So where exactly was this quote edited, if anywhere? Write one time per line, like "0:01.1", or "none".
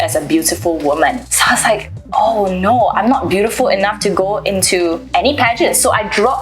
0:01.3
0:05.0